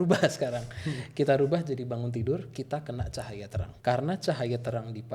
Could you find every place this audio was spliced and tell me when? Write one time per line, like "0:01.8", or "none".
0:03.7

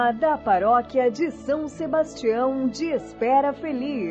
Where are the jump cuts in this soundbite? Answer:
none

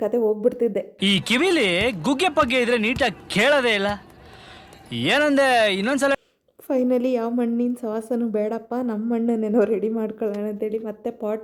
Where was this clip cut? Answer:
none

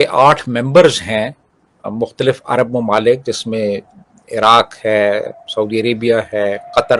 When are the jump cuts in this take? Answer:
none

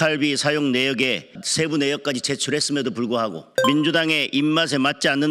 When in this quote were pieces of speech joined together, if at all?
0:01.4
0:03.5

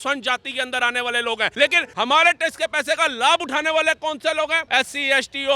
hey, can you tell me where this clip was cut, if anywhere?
0:01.6
0:04.6

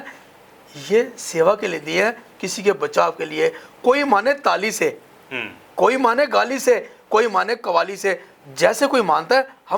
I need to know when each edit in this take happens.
none

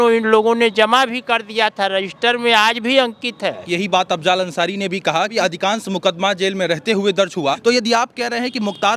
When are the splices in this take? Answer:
0:03.6
0:05.3
0:07.6

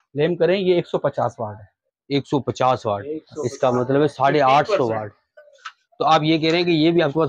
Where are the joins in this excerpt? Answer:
0:05.2

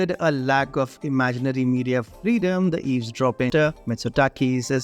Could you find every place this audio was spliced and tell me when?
0:03.5

